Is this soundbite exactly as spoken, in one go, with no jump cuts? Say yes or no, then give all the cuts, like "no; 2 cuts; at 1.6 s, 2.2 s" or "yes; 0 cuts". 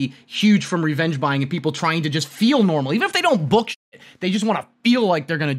yes; 0 cuts